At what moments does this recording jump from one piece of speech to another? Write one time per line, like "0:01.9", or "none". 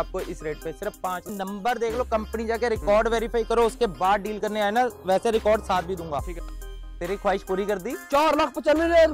0:01.3
0:06.5